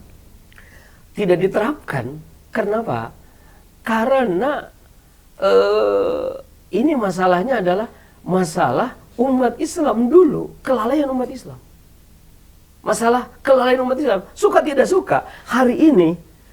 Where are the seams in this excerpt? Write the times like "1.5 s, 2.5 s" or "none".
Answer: none